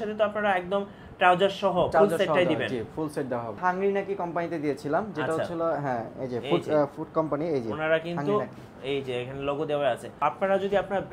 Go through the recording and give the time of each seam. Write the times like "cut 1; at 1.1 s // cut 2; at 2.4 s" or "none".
cut 1; at 3.6 s // cut 2; at 10.2 s